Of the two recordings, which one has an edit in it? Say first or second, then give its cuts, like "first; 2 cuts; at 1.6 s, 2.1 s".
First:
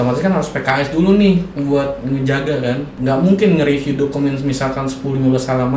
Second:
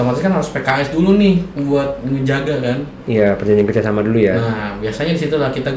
first; 1 cut; at 2.9 s